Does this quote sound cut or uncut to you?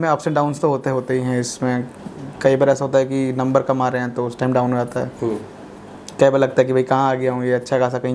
uncut